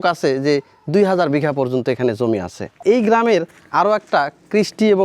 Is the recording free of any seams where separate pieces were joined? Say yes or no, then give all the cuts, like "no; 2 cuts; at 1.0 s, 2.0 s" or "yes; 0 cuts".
no; 1 cut; at 2.8 s